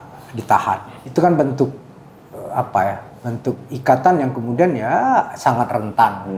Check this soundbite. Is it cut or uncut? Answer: cut